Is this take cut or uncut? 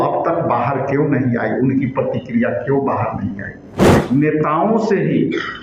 cut